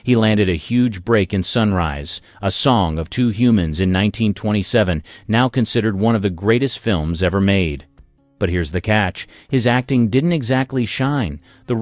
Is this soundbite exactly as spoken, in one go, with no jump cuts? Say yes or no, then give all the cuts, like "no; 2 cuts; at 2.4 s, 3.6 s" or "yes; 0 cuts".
no; 2 cuts; at 3.7 s, 5.2 s